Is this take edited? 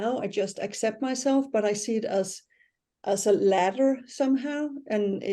no; 0 cuts

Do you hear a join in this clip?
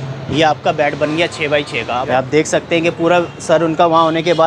yes; 1 cut; at 2.0 s

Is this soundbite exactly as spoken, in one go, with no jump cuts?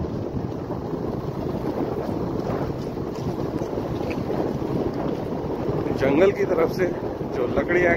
yes; 0 cuts

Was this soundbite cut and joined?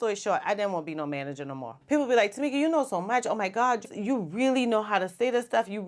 yes; 1 cut; at 1.7 s

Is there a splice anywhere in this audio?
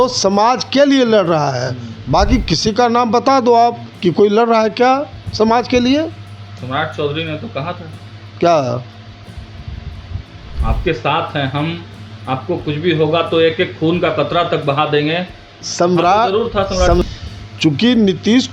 yes; 1 cut; at 17.0 s

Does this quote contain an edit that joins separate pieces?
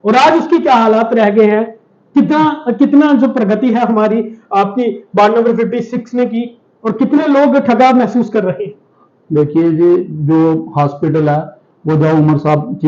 no; 0 cuts

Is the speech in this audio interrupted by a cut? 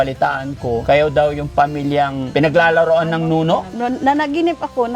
yes; 3 cuts; at 0.8 s, 2.2 s, 3.7 s

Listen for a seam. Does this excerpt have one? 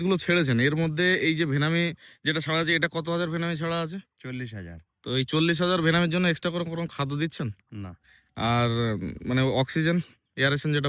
no; 0 cuts

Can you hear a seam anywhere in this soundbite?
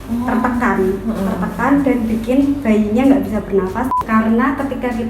yes; 1 cut; at 3.9 s

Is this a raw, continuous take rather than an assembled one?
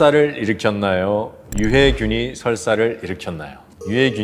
yes; 0 cuts

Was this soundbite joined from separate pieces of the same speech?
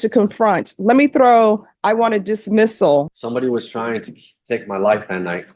yes; 1 cut; at 3.1 s

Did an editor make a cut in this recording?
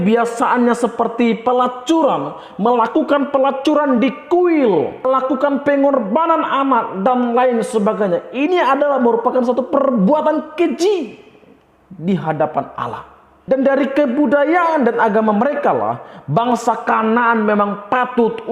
yes; 2 cuts; at 5.1 s, 13.3 s

